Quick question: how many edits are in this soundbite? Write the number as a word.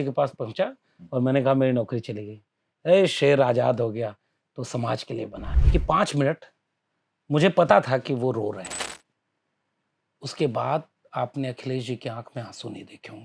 one